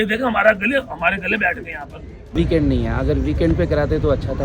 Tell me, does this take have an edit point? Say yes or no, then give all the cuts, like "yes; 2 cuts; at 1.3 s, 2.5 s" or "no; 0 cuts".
yes; 1 cut; at 2.3 s